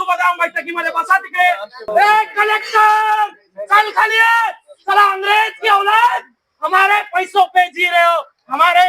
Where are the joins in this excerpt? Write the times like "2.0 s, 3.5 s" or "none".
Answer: 1.8 s